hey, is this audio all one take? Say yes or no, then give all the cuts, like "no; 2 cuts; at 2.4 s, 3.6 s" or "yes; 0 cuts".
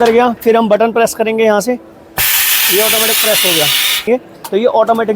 no; 1 cut; at 4.1 s